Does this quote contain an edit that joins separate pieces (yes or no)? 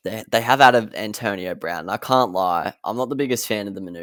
no